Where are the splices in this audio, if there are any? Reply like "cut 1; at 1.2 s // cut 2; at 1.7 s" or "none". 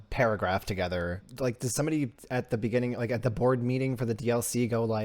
cut 1; at 1.2 s